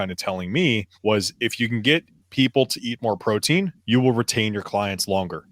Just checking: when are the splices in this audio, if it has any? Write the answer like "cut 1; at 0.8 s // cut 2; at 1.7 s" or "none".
cut 1; at 0.9 s // cut 2; at 3.8 s